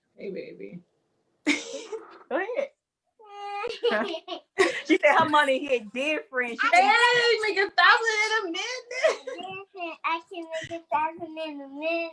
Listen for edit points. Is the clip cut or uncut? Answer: uncut